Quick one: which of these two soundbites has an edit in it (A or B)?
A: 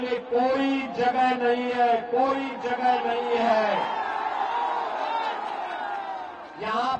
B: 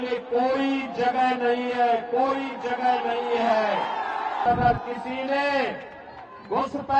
B